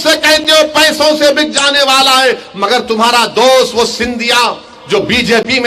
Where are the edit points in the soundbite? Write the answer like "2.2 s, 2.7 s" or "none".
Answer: none